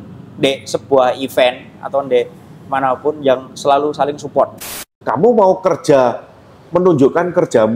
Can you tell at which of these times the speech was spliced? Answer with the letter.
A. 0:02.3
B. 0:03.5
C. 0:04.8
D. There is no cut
C